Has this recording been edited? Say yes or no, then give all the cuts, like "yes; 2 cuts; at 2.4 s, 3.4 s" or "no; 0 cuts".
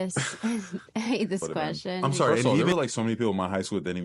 yes; 1 cut; at 2.5 s